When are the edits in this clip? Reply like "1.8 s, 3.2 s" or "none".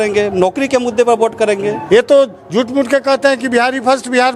1.8 s